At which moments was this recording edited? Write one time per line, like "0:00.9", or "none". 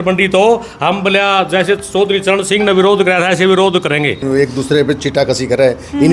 0:04.2